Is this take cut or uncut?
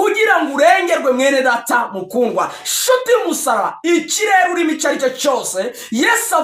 uncut